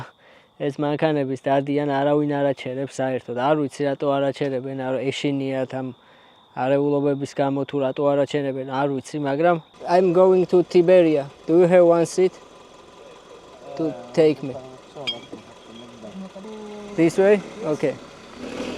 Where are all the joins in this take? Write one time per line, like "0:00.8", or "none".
0:09.7
0:16.4